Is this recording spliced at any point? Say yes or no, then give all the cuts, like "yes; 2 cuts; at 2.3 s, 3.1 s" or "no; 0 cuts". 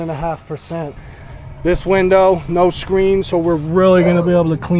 yes; 1 cut; at 1.0 s